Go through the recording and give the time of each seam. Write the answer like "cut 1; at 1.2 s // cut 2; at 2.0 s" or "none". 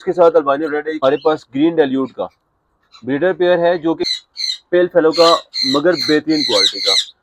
cut 1; at 1.0 s // cut 2; at 4.1 s